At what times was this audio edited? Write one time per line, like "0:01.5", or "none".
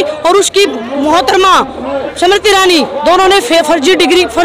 none

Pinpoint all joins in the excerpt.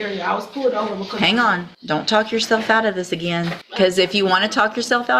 0:01.7
0:03.6

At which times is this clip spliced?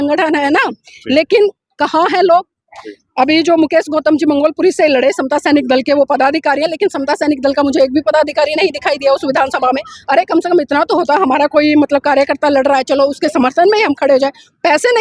none

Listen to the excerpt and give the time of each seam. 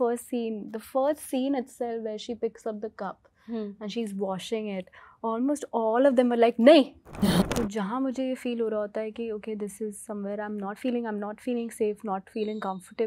0:07.4

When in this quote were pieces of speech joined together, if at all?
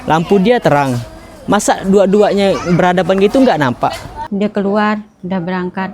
0:04.2

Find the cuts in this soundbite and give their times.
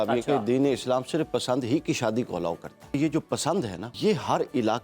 0:03.0
0:03.9

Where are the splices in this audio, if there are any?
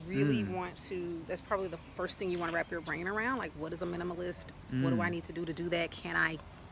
none

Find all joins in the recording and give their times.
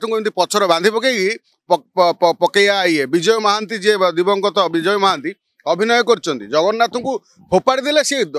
none

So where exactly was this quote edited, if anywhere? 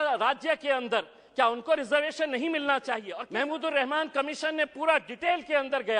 0:03.2

